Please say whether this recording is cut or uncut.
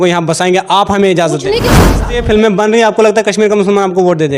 cut